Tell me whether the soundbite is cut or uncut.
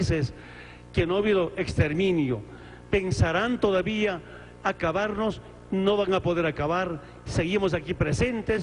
cut